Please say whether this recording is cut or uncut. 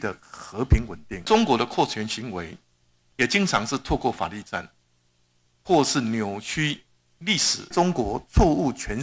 cut